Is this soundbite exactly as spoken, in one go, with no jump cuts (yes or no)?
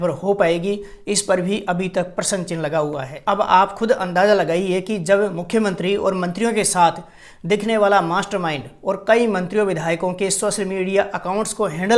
no